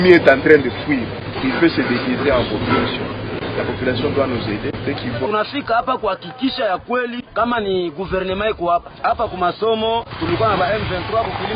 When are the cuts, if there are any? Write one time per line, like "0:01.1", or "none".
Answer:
none